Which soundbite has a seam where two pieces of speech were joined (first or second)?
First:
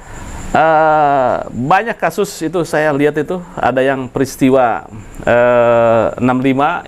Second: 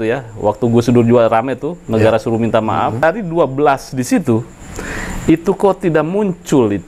second